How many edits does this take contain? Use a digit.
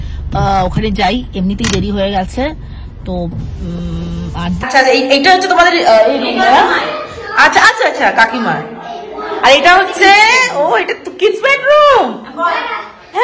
1